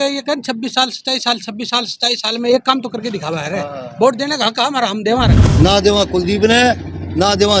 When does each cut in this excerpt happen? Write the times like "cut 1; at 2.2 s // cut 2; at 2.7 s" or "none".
cut 1; at 5.4 s